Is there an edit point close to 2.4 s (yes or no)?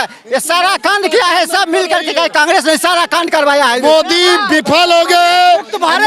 no